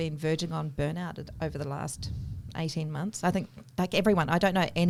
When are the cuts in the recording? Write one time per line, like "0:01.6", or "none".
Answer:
none